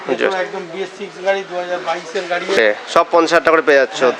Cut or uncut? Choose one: cut